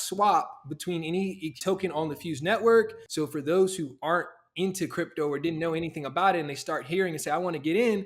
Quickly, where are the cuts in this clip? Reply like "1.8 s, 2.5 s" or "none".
1.6 s, 3.0 s